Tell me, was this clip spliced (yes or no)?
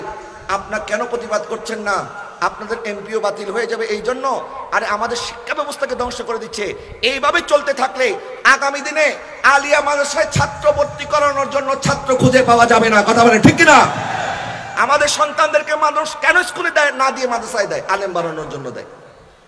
no